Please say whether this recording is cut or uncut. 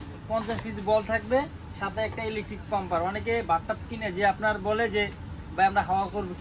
uncut